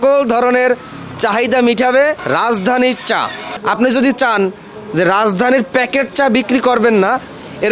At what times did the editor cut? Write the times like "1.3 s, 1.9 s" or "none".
none